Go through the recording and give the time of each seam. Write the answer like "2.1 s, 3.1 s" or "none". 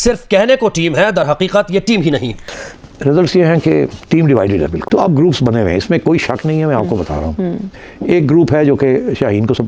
2.5 s, 4.8 s